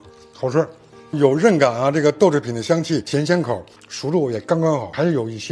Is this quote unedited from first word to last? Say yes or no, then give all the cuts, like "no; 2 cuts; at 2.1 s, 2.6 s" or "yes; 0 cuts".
no; 1 cut; at 3.7 s